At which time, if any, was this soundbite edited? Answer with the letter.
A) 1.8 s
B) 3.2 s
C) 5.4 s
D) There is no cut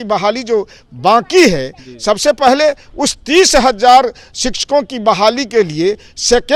D